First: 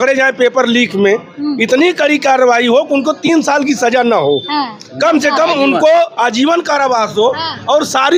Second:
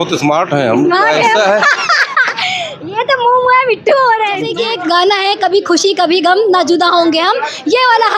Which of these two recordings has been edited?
second; 1 cut; at 4.6 s

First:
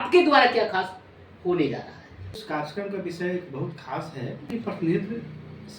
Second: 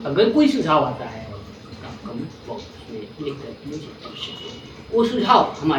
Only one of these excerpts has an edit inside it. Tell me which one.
first; 2 cuts; at 2.4 s, 4.5 s

